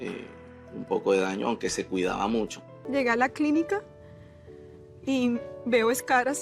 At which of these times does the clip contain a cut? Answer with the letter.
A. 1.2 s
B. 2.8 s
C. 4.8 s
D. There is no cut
B